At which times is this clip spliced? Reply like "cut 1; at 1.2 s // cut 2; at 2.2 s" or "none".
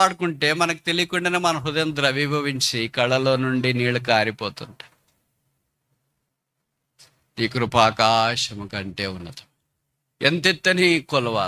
none